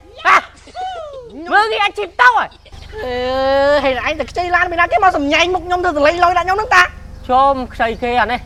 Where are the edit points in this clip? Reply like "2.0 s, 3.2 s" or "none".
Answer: none